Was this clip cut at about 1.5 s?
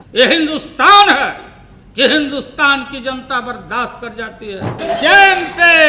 no; 1 cut; at 4.8 s

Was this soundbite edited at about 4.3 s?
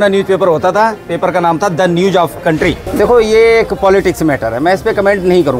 no; 1 cut; at 2.8 s

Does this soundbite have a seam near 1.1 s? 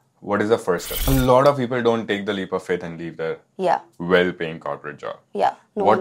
yes; 1 cut; at 1.1 s

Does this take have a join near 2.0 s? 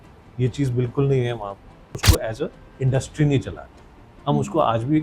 yes; 1 cut; at 2.0 s

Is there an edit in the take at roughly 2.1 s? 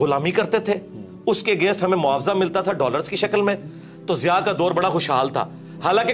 no; 0 cuts

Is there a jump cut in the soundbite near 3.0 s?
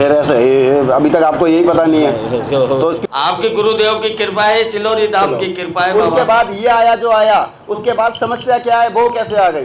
yes; 1 cut; at 3.0 s

